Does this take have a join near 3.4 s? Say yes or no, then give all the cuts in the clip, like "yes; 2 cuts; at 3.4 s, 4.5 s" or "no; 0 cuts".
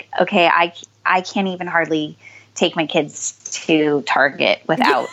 no; 0 cuts